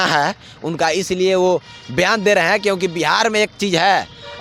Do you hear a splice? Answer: no; 0 cuts

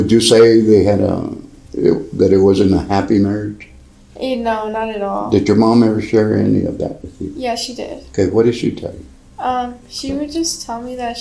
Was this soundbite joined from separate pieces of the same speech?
no; 0 cuts

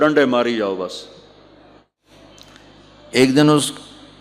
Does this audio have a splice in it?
yes; 1 cut; at 2.0 s

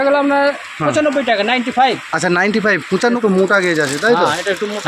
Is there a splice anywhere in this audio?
yes; 1 cut; at 3.2 s

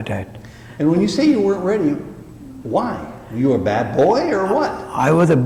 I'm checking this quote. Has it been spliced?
no; 0 cuts

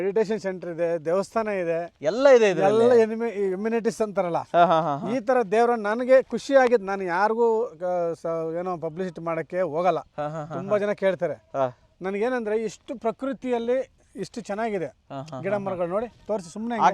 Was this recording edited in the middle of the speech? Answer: no; 0 cuts

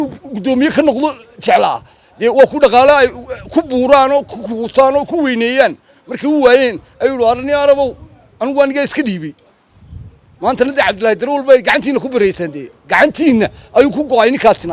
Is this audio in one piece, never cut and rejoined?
yes; 0 cuts

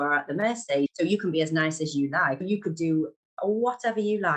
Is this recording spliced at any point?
yes; 2 cuts; at 0.9 s, 2.4 s

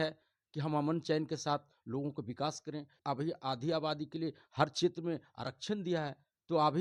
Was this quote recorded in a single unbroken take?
yes; 0 cuts

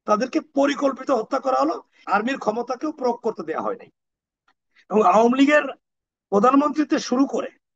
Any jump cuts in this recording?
yes; 1 cut; at 1.9 s

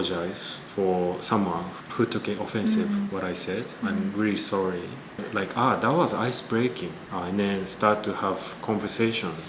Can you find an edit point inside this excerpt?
yes; 1 cut; at 5.2 s

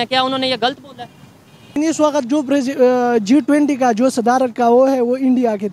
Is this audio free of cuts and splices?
no; 1 cut; at 1.7 s

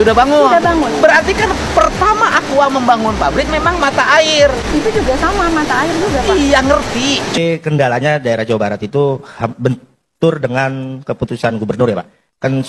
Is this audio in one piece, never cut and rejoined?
no; 1 cut; at 7.4 s

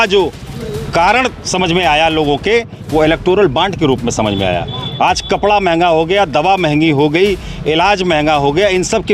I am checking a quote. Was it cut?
no; 0 cuts

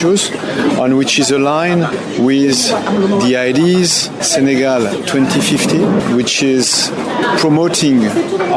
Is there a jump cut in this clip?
yes; 2 cuts; at 4.2 s, 7.0 s

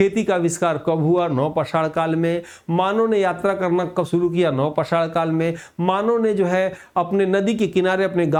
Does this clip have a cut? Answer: no; 0 cuts

